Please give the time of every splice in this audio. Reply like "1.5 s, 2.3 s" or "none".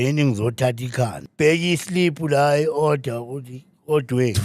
1.2 s